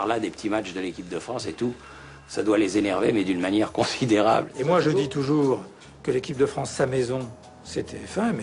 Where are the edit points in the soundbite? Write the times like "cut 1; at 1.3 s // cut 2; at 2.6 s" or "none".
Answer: cut 1; at 4.5 s